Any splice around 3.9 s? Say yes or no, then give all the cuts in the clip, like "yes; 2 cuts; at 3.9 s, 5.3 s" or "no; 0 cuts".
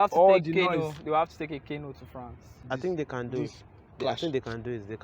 no; 1 cut; at 2.6 s